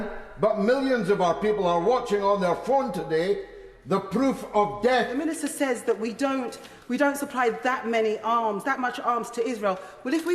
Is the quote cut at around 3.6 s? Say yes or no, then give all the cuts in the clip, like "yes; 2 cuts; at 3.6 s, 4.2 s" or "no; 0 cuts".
no; 1 cut; at 5.3 s